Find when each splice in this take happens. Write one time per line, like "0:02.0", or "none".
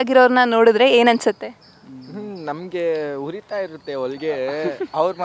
none